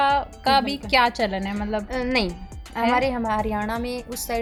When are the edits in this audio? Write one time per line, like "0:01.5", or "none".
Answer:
none